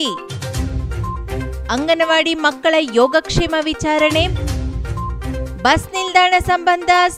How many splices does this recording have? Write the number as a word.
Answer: zero